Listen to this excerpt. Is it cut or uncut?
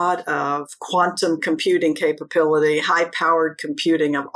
uncut